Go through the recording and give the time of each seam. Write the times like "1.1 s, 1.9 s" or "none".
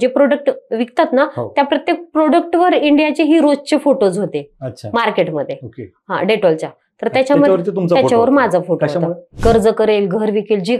9.3 s